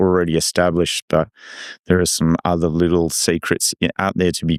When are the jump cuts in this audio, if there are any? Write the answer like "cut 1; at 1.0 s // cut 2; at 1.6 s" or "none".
none